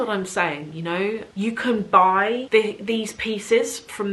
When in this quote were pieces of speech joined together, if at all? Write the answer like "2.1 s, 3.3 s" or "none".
1.2 s, 2.4 s